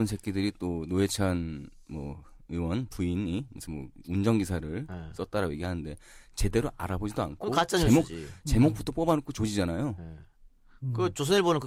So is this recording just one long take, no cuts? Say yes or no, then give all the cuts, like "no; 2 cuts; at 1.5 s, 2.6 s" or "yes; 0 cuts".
yes; 0 cuts